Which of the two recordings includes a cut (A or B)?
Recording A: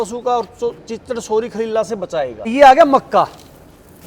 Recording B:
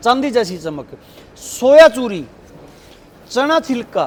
A